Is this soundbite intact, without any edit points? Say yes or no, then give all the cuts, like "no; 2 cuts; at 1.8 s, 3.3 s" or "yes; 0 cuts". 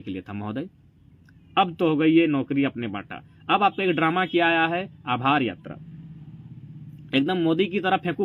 yes; 0 cuts